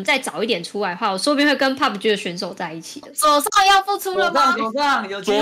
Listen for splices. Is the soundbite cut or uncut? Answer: cut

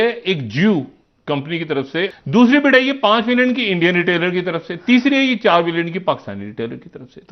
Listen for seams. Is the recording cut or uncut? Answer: cut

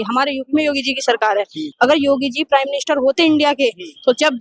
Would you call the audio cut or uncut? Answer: cut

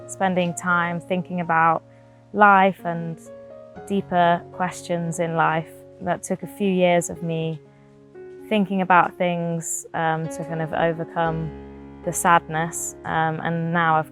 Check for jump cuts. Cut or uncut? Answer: cut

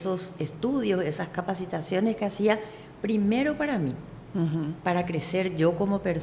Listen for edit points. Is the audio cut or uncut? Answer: uncut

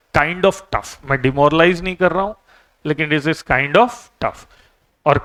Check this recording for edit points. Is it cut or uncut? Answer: uncut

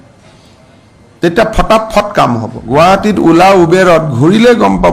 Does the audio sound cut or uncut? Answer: cut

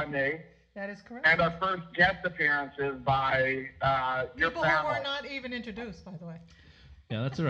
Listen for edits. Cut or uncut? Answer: uncut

